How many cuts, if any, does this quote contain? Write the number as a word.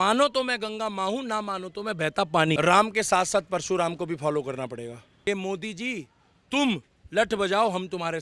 two